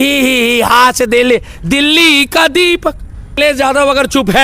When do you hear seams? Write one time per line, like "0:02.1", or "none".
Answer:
0:03.4